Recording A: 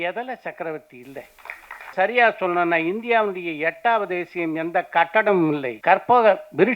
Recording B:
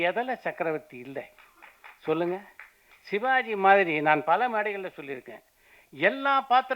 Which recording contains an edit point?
A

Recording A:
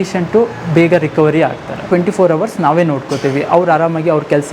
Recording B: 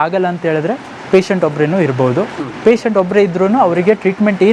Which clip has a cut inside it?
A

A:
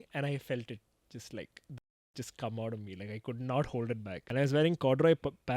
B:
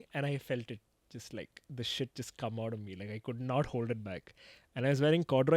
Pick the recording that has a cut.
A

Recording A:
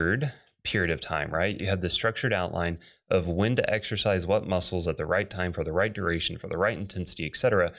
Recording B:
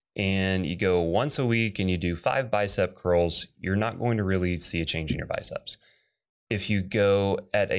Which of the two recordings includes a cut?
A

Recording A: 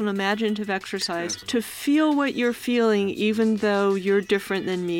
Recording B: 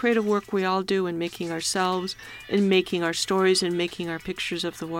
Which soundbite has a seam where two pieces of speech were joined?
A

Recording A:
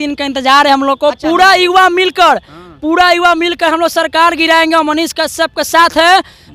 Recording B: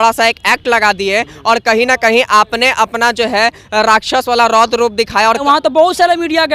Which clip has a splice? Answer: B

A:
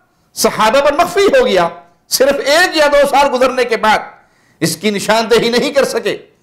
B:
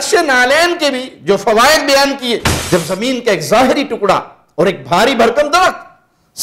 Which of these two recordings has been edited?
B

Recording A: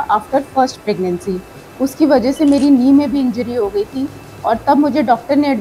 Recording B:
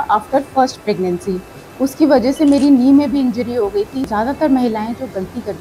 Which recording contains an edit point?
B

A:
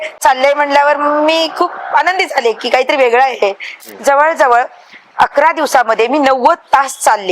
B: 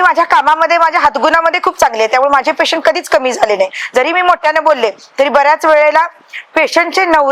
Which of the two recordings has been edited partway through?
A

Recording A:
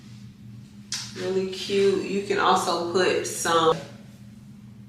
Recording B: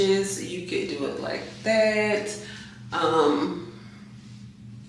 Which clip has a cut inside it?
A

